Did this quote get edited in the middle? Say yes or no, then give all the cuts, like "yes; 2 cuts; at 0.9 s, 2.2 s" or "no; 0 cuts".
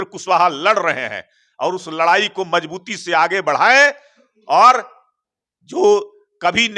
no; 0 cuts